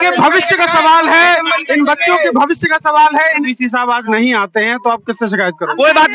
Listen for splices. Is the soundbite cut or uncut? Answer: cut